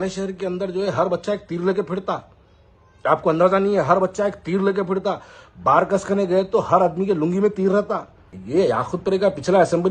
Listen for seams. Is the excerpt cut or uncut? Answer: cut